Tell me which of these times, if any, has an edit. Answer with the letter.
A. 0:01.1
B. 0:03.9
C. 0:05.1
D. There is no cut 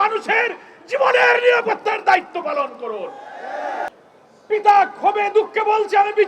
B